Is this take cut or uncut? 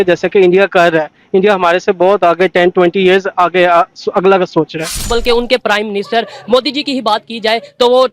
cut